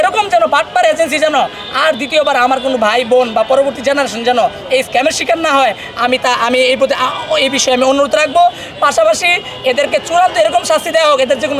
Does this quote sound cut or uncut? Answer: uncut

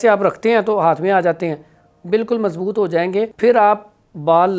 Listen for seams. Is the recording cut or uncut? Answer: cut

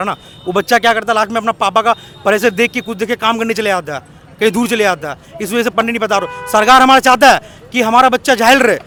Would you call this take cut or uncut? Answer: uncut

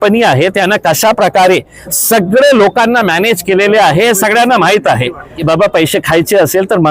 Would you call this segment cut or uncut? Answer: cut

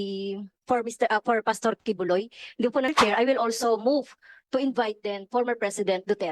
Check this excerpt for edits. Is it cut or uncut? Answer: cut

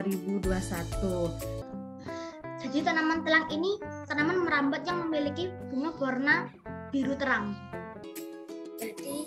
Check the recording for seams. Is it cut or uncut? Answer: cut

